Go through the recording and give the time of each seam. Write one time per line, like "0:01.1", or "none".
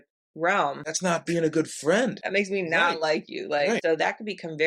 0:00.9
0:02.2
0:03.8